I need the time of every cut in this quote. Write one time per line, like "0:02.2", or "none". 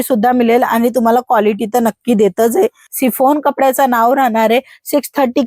0:02.8

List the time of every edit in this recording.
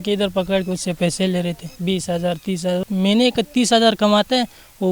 0:01.7
0:02.8

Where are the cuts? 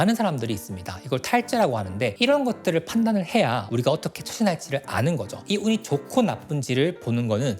0:05.4

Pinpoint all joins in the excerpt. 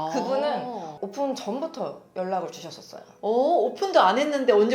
0:01.0

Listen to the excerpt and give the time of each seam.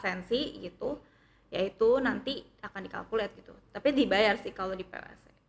none

